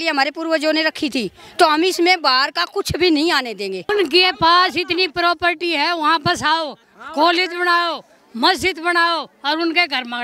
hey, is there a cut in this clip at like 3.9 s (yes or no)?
yes